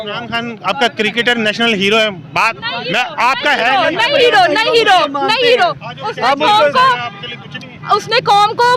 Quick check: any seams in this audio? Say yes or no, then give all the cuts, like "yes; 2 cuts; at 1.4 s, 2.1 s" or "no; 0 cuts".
no; 0 cuts